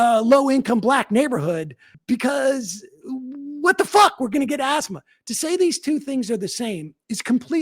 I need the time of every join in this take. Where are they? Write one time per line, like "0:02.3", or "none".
0:01.9